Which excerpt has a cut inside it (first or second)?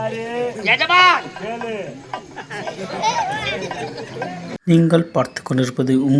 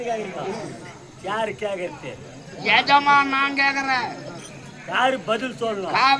first